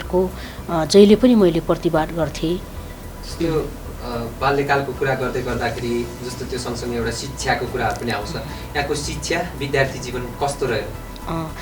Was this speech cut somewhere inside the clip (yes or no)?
no